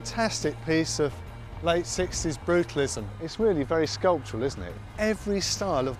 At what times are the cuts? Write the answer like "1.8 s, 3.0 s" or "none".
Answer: none